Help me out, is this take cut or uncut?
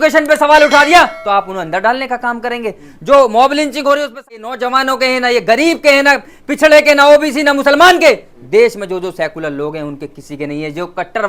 cut